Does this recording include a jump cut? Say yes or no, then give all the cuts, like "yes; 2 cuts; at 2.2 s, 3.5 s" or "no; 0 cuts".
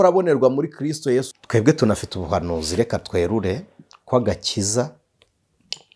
yes; 1 cut; at 1.3 s